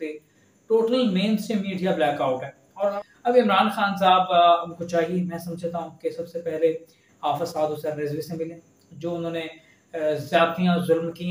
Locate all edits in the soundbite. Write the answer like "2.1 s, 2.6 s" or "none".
2.9 s